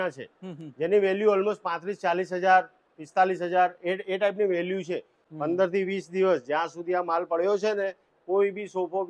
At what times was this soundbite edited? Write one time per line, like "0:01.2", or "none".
0:05.2